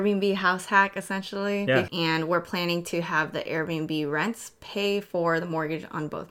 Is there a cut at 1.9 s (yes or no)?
yes